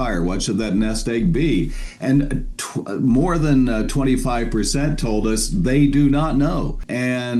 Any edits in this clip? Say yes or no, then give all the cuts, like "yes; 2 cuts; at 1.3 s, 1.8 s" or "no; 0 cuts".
no; 0 cuts